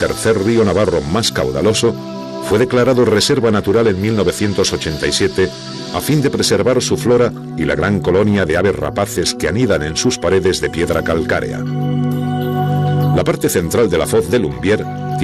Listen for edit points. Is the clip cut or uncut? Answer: cut